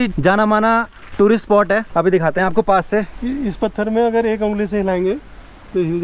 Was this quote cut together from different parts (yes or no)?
no